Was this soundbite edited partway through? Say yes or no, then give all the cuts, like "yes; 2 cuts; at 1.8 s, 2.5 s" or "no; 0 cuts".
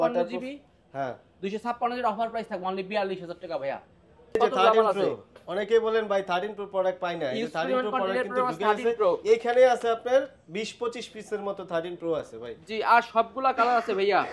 yes; 1 cut; at 4.4 s